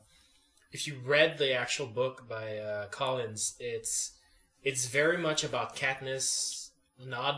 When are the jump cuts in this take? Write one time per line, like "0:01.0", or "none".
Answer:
0:03.4